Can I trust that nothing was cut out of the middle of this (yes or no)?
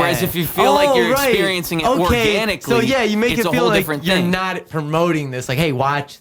yes